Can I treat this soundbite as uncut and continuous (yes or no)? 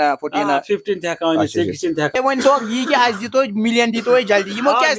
no